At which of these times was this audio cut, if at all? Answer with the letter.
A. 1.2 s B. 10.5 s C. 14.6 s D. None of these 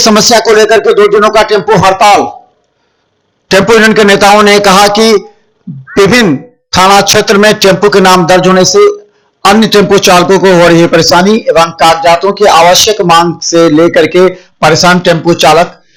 D